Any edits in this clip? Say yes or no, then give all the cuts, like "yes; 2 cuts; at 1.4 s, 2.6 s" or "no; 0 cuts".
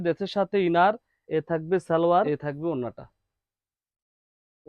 yes; 2 cuts; at 1.1 s, 2.4 s